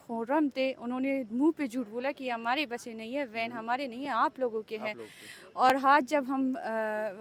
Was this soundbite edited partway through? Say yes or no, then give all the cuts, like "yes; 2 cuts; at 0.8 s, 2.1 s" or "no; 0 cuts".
no; 0 cuts